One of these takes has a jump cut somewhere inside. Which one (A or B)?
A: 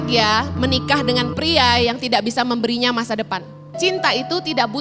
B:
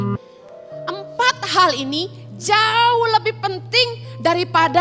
A